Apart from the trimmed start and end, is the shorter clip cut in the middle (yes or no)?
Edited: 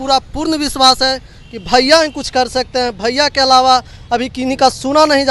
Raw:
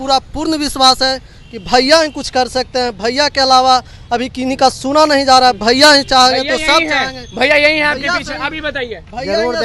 no